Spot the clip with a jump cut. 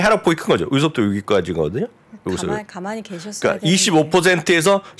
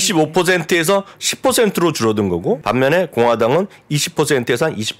second; 1 cut; at 2.6 s

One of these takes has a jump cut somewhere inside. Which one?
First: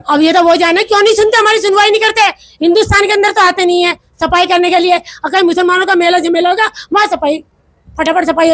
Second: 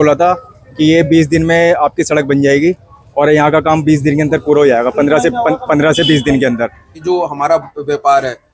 second; 1 cut; at 6.9 s

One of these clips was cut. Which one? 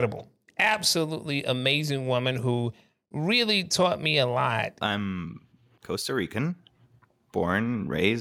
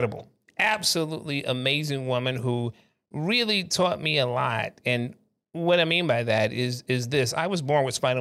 first; 1 cut; at 4.7 s

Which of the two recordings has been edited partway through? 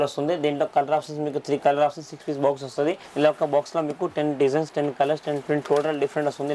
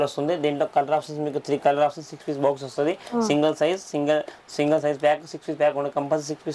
first; 1 cut; at 3.0 s

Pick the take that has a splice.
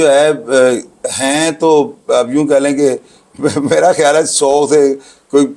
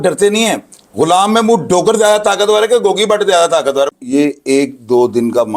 second; 1 cut; at 4.0 s

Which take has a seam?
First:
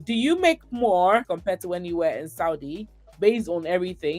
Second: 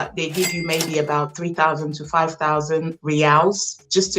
first; 1 cut; at 1.3 s

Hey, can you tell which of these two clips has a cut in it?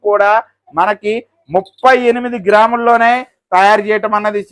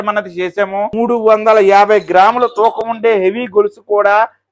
second; 1 cut; at 0.9 s

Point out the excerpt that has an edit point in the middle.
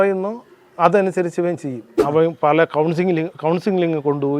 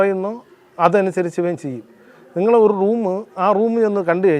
first; 1 cut; at 2.0 s

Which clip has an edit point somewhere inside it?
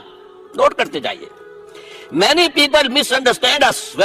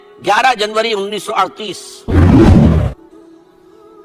second; 2 cuts; at 2.0 s, 2.7 s

